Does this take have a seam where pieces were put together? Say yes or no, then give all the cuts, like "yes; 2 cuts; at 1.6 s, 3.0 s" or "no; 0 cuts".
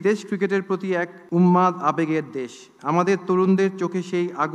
yes; 1 cut; at 1.2 s